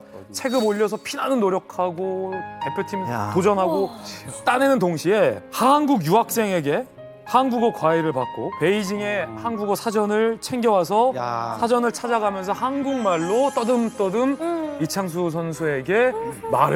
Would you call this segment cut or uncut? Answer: uncut